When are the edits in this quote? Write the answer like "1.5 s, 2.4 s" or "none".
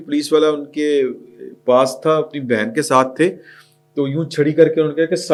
none